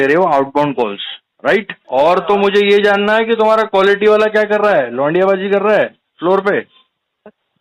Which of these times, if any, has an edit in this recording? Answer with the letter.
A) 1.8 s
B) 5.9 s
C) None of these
A